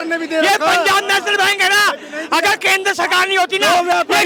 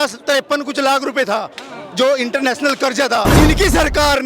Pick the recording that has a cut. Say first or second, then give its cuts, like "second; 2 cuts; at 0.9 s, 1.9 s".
second; 1 cut; at 3.3 s